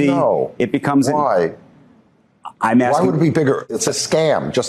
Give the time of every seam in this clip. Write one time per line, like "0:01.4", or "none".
0:03.7